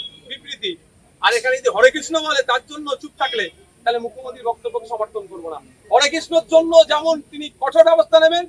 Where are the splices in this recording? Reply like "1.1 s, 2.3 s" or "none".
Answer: none